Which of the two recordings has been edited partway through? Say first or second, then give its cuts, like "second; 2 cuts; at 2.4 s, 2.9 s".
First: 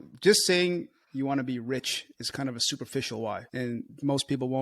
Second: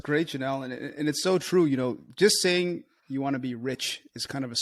first; 1 cut; at 3.6 s